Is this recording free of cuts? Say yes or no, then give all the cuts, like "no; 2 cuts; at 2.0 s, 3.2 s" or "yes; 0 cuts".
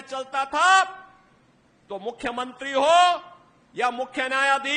yes; 0 cuts